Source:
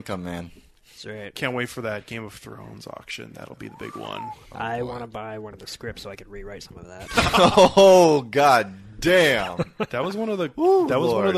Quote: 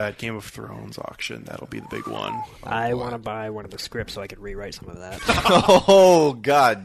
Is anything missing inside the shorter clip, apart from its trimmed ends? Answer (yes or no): no